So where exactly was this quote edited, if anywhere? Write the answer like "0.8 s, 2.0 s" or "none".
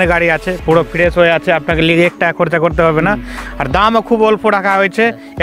none